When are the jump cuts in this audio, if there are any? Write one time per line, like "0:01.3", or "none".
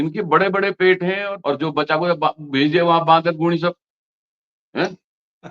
0:01.3